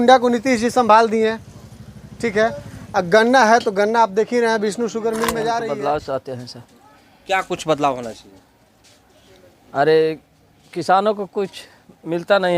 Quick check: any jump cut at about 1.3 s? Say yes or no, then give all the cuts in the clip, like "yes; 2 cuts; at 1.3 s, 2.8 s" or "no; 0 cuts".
no; 1 cut; at 5.6 s